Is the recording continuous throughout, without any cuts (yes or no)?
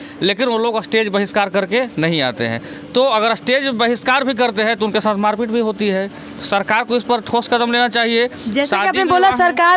yes